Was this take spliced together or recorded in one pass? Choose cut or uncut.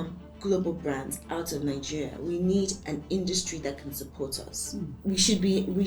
cut